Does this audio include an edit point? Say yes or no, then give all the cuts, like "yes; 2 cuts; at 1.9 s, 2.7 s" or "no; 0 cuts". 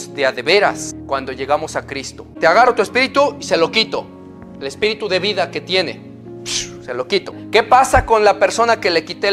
yes; 3 cuts; at 0.9 s, 2.3 s, 7.4 s